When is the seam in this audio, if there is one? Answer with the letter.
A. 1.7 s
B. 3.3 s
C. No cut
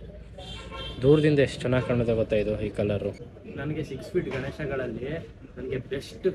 B